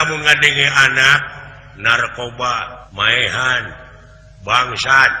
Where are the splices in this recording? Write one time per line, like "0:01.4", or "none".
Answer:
0:02.8